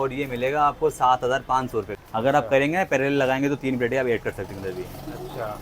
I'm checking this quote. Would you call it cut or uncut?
cut